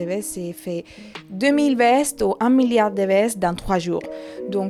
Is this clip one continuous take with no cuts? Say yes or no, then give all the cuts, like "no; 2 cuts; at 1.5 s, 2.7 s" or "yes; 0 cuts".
yes; 0 cuts